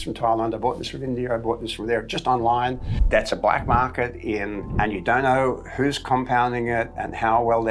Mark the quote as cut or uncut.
cut